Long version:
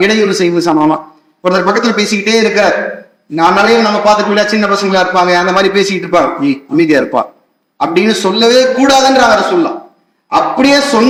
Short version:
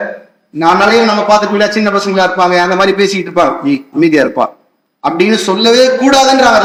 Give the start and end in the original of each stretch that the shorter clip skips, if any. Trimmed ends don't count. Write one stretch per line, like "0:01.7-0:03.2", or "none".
none